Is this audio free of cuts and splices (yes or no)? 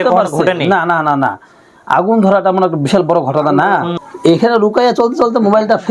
no